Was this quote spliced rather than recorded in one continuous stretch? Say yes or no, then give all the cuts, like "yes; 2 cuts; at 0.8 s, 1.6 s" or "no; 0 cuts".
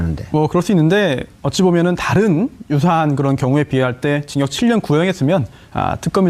yes; 1 cut; at 1.8 s